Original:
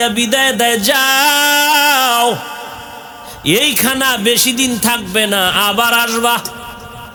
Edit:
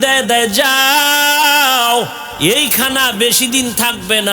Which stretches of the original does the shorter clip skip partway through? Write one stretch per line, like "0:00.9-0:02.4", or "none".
0:02.5-0:03.3